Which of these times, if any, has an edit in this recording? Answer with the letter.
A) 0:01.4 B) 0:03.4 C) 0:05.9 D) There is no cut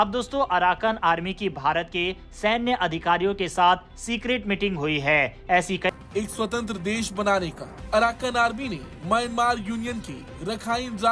C